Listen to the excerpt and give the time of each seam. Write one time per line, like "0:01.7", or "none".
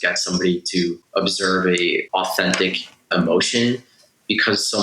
0:01.0
0:02.1
0:03.1